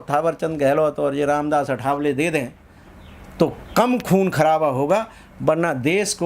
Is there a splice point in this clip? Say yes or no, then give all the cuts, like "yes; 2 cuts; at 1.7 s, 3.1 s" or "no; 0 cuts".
no; 0 cuts